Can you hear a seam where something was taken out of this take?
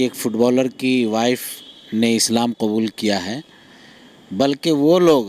no; 0 cuts

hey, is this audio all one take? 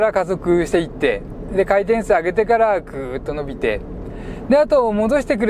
yes; 0 cuts

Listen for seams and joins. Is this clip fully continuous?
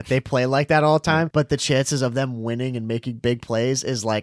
no; 1 cut; at 1.3 s

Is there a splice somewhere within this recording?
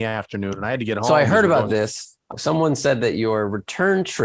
yes; 1 cut; at 2.3 s

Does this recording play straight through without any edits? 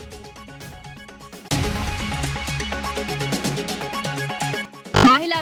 yes; 0 cuts

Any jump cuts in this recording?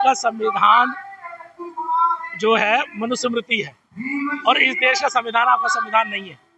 no; 0 cuts

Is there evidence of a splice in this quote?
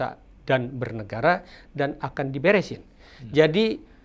no; 0 cuts

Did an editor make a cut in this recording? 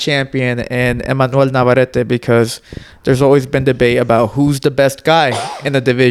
no; 0 cuts

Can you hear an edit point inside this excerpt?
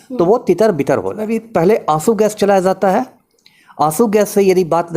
yes; 1 cut; at 1.4 s

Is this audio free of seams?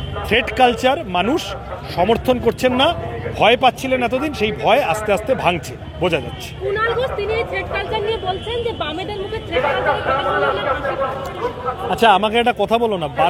yes; 0 cuts

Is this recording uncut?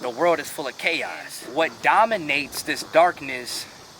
no; 1 cut; at 1.4 s

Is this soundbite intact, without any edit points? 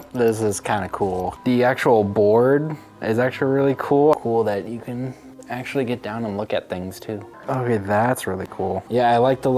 yes; 0 cuts

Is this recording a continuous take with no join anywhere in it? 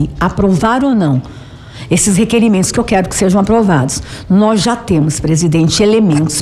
yes; 0 cuts

